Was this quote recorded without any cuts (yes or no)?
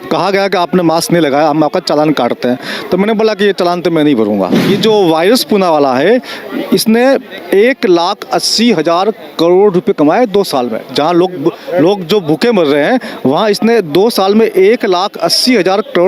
no